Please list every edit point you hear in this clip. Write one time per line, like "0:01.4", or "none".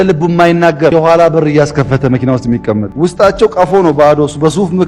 0:00.9
0:02.9